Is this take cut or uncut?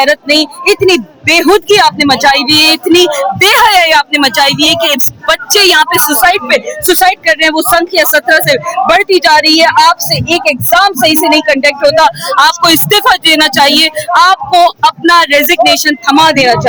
uncut